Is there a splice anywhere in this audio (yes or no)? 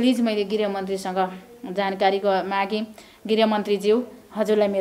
no